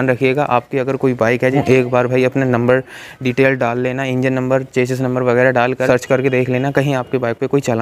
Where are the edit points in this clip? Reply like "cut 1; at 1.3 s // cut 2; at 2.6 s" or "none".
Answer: cut 1; at 1.5 s // cut 2; at 5.9 s